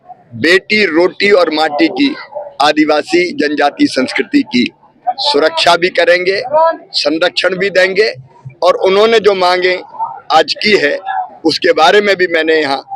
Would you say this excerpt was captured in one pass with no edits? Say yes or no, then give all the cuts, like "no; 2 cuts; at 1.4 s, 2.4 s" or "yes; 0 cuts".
yes; 0 cuts